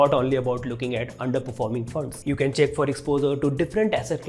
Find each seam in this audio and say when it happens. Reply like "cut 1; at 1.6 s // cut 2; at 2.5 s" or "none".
none